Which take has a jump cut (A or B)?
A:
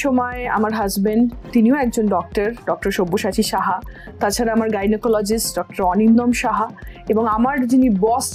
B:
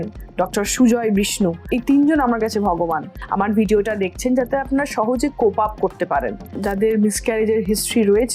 B